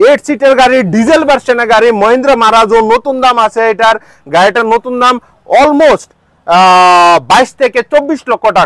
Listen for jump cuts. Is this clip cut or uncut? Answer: uncut